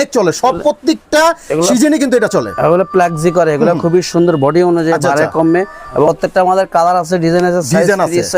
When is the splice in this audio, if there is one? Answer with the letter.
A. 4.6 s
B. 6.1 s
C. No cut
B